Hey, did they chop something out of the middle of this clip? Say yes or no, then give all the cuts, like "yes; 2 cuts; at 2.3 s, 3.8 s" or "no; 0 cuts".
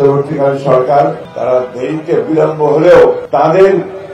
yes; 2 cuts; at 1.3 s, 3.2 s